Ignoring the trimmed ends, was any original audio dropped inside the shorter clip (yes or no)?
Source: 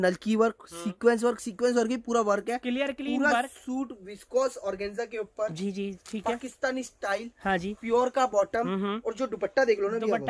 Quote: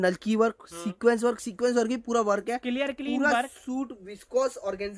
no